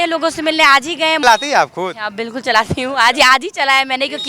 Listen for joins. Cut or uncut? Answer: cut